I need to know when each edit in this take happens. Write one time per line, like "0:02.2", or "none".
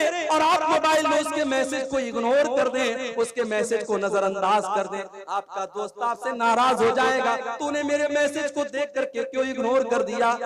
none